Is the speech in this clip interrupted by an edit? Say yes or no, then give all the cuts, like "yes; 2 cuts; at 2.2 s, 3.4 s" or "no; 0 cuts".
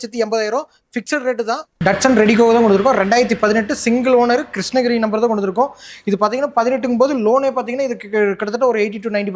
yes; 1 cut; at 1.8 s